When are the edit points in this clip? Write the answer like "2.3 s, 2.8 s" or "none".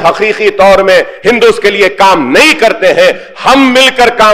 none